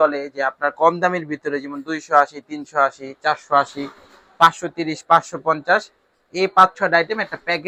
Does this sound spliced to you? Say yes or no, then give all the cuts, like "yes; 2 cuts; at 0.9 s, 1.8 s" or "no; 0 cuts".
no; 0 cuts